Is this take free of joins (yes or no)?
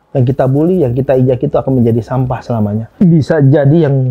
no